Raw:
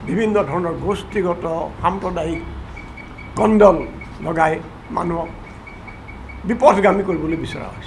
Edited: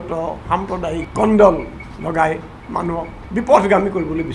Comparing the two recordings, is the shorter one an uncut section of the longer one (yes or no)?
no